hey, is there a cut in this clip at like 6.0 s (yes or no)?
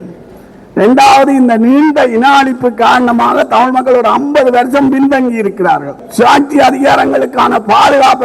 yes